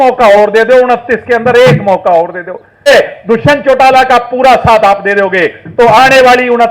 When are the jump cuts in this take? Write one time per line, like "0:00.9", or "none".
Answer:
0:02.9